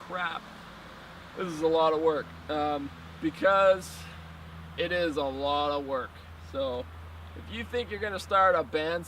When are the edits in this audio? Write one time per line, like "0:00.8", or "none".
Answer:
0:04.7

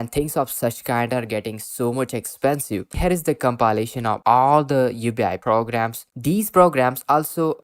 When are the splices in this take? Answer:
0:03.0
0:06.1

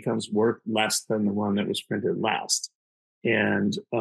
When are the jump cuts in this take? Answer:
none

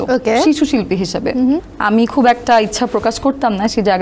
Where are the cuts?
0:01.7

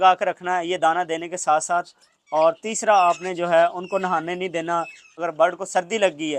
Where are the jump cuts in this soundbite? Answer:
0:05.2

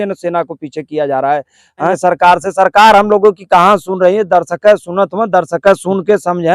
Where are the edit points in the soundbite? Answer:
0:02.0

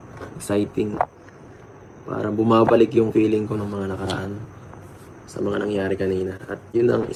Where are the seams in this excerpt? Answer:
none

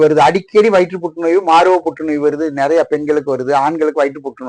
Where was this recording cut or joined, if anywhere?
none

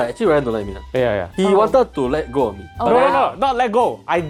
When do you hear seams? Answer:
none

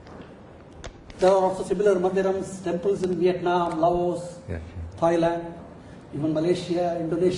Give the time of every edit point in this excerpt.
0:04.4

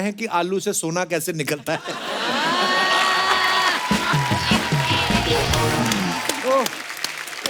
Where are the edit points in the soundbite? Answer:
none

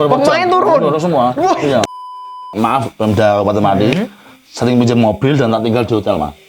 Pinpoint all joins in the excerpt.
0:02.2

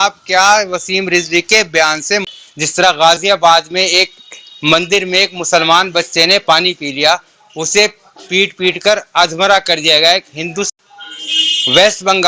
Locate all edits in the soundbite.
0:02.3
0:10.7

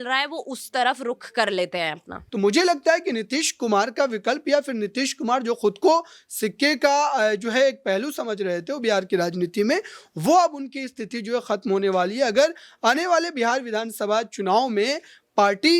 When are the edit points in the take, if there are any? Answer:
0:02.2

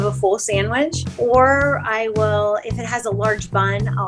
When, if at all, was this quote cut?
0:01.0

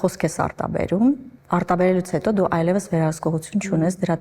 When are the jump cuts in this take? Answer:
0:01.3

